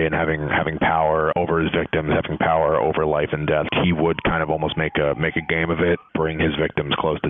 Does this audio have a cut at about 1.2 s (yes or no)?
no